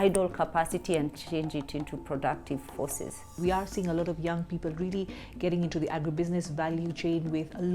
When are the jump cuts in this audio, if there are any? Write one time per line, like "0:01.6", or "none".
0:03.4